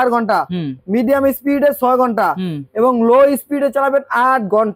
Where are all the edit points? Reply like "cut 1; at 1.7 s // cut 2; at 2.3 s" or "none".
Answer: none